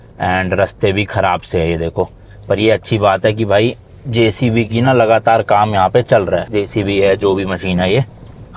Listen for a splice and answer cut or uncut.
uncut